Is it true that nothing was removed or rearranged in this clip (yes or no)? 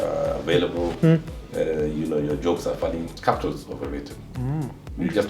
no